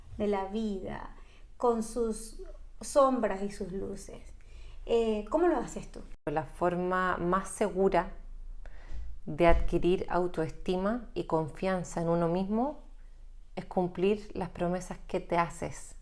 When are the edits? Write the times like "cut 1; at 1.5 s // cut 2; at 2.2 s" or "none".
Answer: cut 1; at 6.3 s